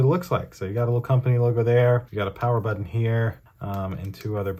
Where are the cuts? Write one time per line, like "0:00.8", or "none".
none

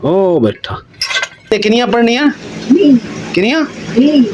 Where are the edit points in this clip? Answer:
0:01.5

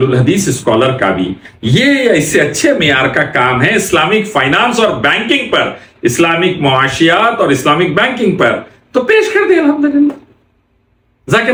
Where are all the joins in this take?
none

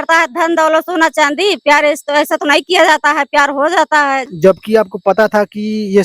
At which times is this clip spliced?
0:04.3

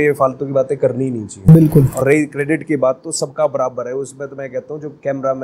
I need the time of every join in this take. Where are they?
none

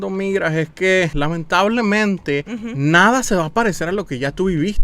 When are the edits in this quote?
0:01.1
0:02.6

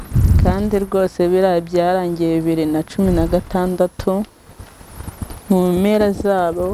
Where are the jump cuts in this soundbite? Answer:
none

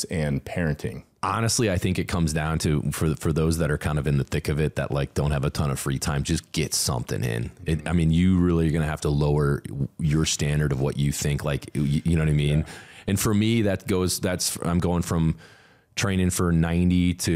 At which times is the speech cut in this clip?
0:01.1

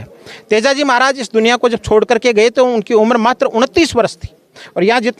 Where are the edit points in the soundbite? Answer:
none

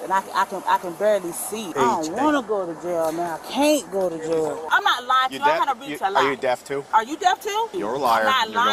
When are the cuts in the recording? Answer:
0:01.6
0:04.6
0:06.8
0:07.7

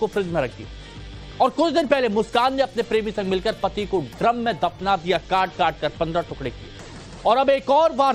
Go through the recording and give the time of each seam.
0:06.4

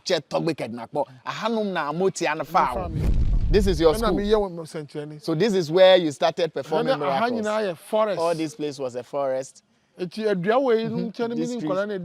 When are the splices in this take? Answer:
0:03.3

